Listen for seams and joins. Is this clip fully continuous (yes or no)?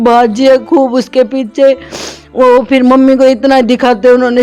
yes